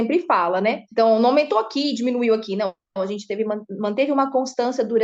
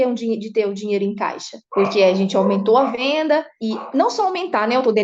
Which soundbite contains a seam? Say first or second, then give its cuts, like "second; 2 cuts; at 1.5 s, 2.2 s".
second; 2 cuts; at 1.6 s, 3.0 s